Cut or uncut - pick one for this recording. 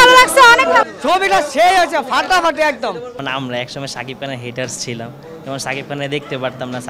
cut